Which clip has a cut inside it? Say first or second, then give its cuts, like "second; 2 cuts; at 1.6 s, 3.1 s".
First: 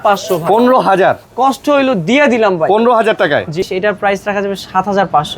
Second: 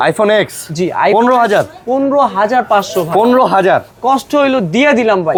first; 1 cut; at 3.6 s